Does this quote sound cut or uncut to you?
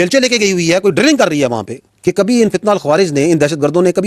cut